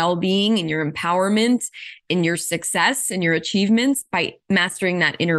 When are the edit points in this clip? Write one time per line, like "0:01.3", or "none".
0:04.4